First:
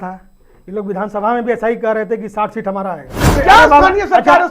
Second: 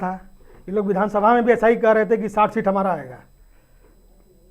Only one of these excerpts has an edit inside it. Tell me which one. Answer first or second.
first